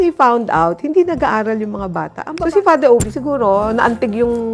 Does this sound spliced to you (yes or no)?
yes